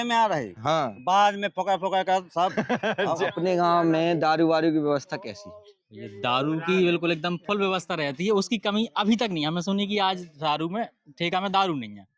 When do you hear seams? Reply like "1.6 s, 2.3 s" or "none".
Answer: 3.3 s